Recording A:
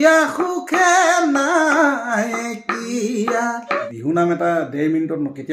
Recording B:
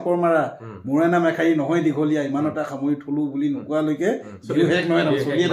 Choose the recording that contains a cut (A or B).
A